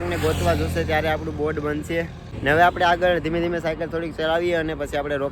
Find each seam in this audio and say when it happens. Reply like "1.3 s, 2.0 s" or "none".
2.2 s